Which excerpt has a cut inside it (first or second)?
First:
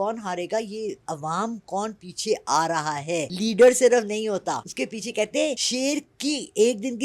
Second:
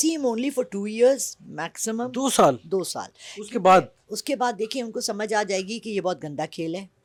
first